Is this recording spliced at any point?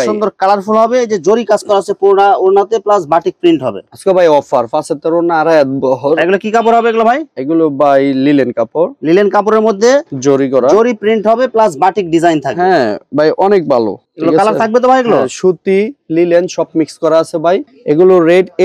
no; 0 cuts

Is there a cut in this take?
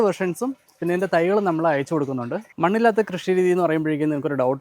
yes; 1 cut; at 2.4 s

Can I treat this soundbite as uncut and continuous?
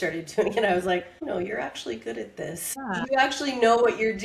no; 1 cut; at 3.0 s

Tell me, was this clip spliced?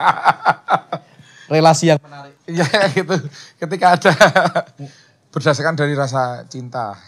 no; 0 cuts

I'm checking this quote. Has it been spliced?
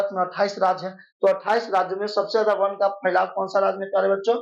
no; 0 cuts

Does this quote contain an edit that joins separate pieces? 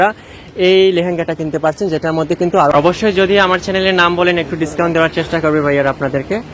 yes; 1 cut; at 2.7 s

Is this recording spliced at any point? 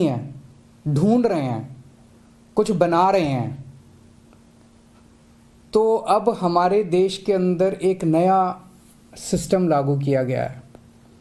yes; 1 cut; at 1.2 s

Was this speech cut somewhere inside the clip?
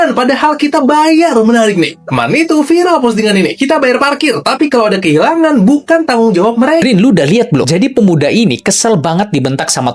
yes; 1 cut; at 6.8 s

